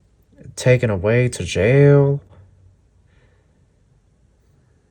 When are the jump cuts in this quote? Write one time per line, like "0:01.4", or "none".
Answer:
none